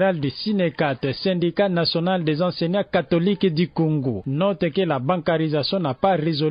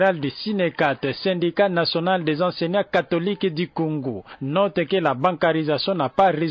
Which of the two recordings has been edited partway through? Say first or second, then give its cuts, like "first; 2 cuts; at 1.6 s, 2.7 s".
first; 1 cut; at 4.2 s